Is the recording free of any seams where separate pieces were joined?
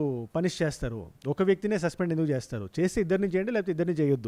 yes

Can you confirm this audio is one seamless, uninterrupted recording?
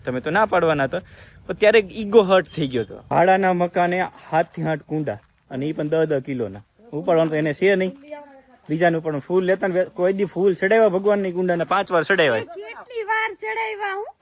no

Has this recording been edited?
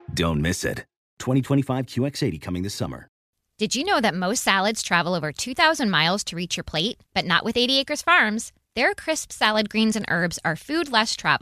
yes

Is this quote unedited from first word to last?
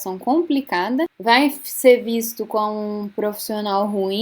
no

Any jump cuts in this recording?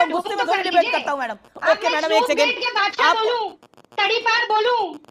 no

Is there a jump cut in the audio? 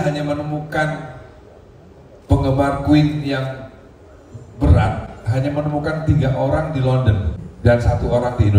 yes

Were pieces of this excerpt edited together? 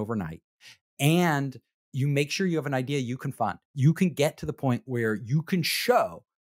no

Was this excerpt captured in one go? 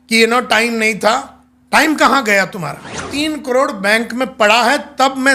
no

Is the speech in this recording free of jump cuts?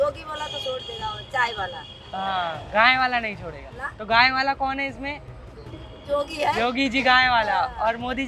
yes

